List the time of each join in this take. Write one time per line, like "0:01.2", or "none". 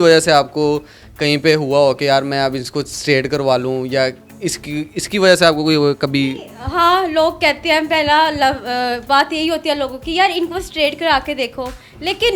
none